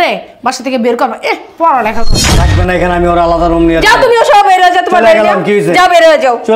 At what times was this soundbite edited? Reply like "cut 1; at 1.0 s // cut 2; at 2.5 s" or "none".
cut 1; at 2.3 s